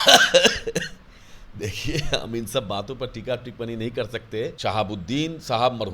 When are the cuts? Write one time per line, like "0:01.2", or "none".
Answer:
0:04.6